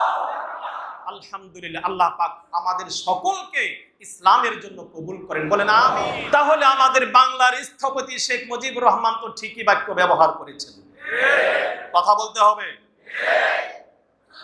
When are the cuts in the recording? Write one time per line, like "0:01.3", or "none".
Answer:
0:06.1